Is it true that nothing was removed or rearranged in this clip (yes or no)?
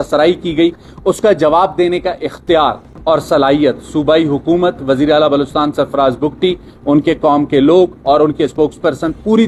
yes